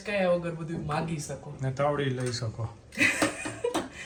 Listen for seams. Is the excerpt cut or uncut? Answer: uncut